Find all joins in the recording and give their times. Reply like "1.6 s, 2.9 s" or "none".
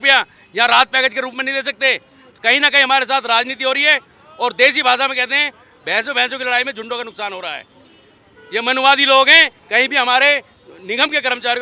none